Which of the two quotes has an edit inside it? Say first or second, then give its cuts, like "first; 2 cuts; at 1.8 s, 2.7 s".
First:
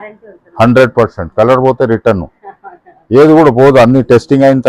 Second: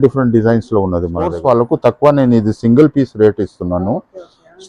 second; 1 cut; at 1.4 s